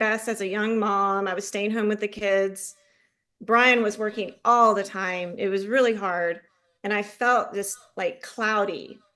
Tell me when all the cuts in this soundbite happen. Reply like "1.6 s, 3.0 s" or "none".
none